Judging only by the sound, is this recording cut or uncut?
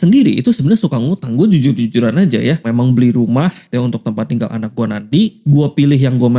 cut